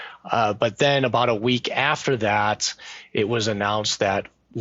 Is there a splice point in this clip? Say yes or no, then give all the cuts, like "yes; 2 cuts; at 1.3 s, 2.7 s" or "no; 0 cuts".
no; 0 cuts